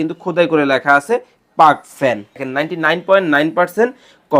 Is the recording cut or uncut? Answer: cut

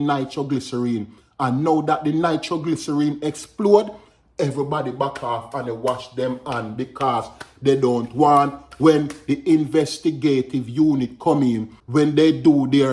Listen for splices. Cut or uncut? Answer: cut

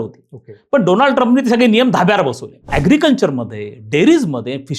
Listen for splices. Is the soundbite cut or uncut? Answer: cut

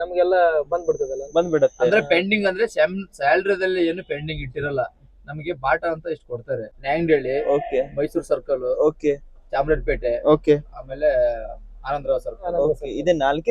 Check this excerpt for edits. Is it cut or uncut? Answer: cut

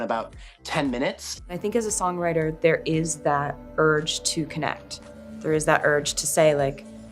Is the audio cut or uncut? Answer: cut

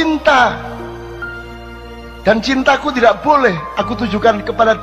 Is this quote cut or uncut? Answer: uncut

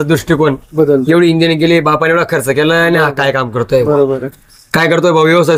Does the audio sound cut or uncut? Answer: uncut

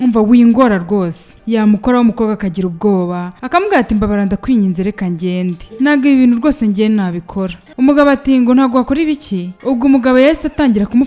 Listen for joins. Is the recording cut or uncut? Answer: uncut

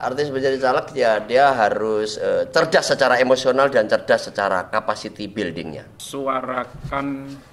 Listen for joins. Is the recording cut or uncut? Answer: cut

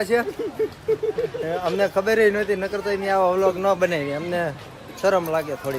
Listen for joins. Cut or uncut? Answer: uncut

